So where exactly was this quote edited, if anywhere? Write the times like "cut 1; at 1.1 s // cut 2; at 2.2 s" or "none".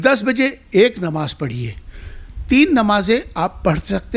none

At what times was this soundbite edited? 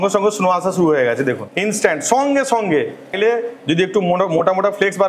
cut 1; at 1.5 s // cut 2; at 3.1 s

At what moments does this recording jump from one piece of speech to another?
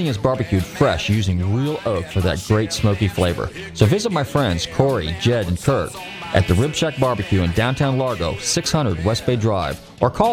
none

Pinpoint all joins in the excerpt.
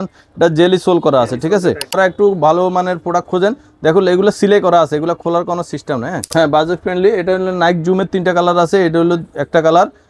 cut 1; at 2.0 s // cut 2; at 6.2 s

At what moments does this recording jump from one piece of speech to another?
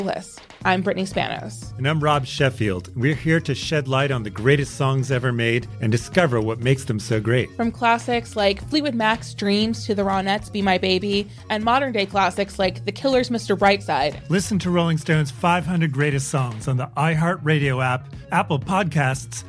none

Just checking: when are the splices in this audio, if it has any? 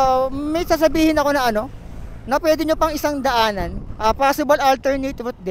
cut 1; at 3.8 s

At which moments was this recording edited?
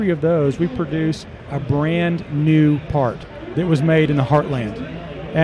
cut 1; at 3.4 s

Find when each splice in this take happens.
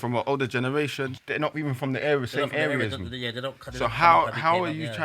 cut 1; at 1.2 s

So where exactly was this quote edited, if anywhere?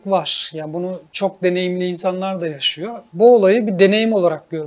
cut 1; at 1.0 s // cut 2; at 3.0 s

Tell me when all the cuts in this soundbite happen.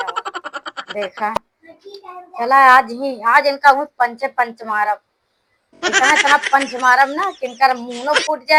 none

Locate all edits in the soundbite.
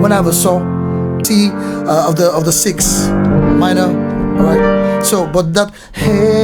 cut 1; at 1.2 s

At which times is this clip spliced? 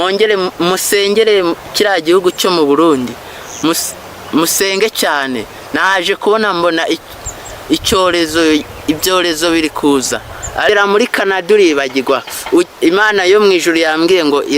cut 1; at 10.7 s

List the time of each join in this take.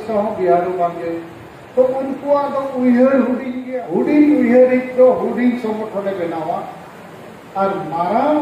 cut 1; at 3.5 s

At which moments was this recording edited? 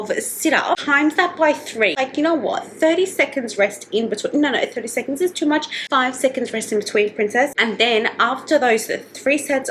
cut 1; at 1.9 s

